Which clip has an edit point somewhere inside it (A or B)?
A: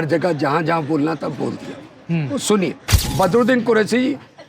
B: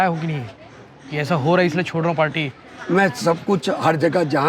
A